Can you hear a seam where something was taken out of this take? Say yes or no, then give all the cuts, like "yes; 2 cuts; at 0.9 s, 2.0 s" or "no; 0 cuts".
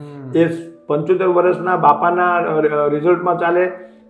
no; 0 cuts